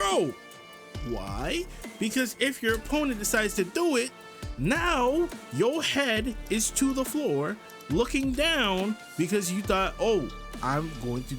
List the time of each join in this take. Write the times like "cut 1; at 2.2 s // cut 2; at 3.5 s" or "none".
none